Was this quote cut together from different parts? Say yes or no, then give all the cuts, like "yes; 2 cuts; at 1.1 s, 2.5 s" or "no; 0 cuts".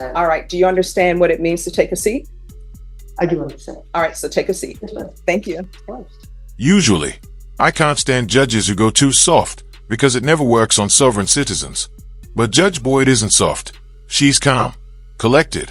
no; 0 cuts